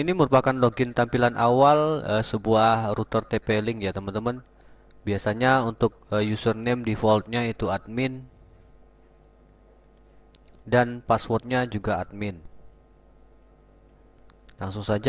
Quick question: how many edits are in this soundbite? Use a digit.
0